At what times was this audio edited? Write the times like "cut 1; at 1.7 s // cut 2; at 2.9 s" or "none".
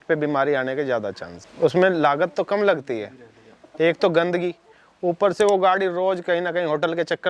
none